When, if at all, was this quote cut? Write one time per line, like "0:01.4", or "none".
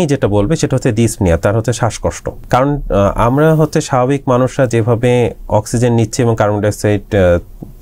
0:02.3